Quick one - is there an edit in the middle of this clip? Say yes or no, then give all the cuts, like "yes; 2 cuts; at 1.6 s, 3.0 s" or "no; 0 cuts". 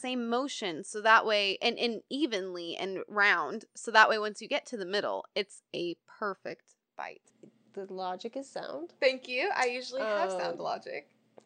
yes; 1 cut; at 7.2 s